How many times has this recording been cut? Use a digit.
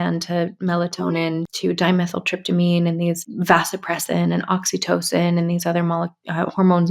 2